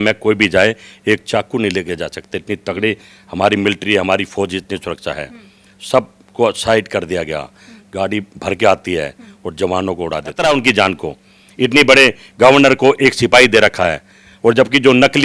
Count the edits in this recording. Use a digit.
1